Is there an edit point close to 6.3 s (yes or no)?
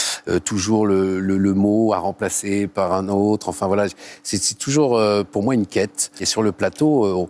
yes